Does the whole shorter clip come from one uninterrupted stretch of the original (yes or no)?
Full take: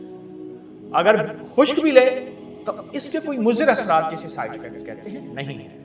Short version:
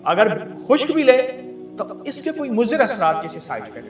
yes